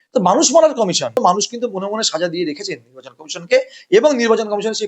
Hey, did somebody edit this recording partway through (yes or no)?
yes